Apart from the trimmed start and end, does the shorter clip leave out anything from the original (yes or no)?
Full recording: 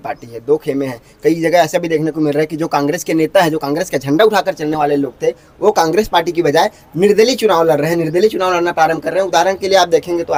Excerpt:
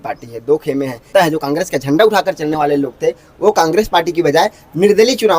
yes